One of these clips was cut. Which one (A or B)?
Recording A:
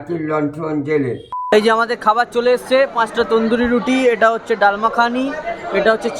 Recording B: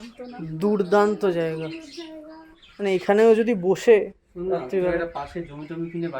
A